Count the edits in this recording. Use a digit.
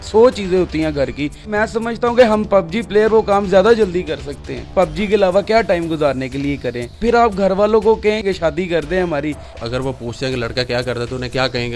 5